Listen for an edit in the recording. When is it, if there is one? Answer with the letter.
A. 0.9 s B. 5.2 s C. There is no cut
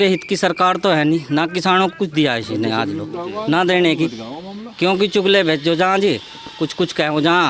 C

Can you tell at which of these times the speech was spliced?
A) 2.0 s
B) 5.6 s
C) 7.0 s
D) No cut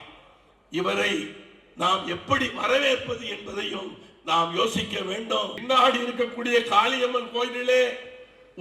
B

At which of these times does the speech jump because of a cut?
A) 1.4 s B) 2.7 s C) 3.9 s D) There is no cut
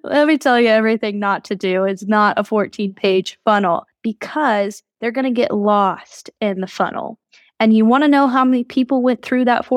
C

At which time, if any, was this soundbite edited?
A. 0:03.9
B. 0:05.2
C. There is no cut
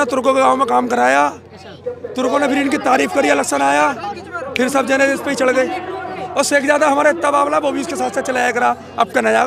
C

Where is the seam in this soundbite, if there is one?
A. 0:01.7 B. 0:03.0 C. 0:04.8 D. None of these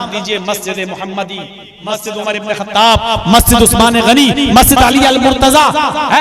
A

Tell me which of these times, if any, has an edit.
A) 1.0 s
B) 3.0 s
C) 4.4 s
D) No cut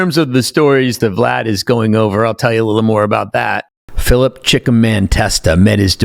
A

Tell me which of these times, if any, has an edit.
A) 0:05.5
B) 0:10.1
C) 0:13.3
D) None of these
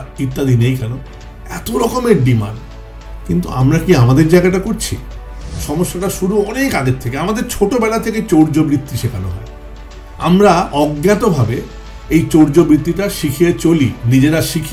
A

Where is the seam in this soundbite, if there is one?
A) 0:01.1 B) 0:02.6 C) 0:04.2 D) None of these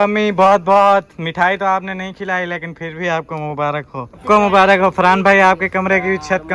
C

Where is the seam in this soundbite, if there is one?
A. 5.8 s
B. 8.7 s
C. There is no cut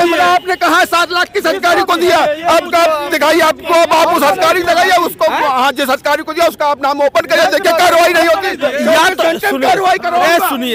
C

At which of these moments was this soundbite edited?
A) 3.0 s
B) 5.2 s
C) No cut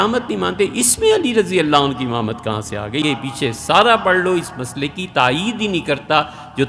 A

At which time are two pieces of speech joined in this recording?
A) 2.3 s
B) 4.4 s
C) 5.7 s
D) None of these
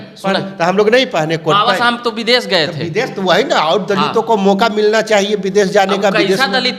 D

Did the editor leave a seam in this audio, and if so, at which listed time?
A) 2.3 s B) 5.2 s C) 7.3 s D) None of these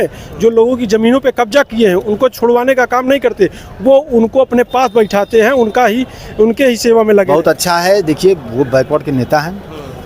C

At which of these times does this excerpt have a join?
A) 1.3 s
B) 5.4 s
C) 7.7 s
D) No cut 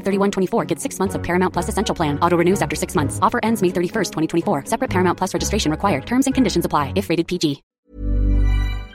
C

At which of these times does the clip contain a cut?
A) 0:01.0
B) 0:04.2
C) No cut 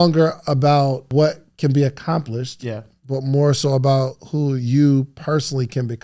A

